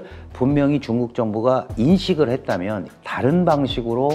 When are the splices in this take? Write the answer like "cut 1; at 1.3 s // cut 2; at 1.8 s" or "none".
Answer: cut 1; at 2.8 s